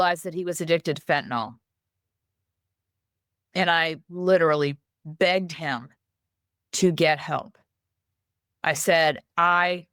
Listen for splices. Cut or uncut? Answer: uncut